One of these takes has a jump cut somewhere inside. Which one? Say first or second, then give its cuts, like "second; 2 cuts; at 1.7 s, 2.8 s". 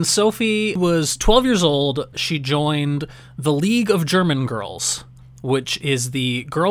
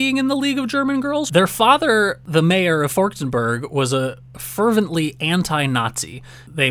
second; 2 cuts; at 1.3 s, 2.2 s